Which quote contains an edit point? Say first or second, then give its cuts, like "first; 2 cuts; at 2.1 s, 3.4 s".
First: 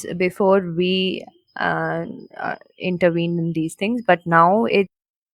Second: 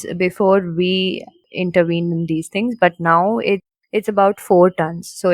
second; 2 cuts; at 1.4 s, 3.8 s